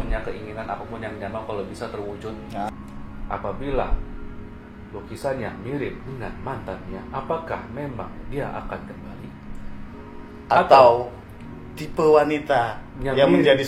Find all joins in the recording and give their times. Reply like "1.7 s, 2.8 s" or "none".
2.7 s